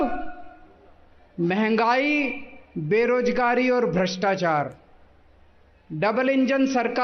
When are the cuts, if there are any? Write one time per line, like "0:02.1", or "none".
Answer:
none